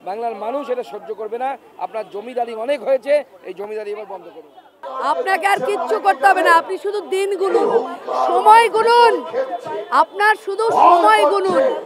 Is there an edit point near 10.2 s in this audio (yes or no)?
no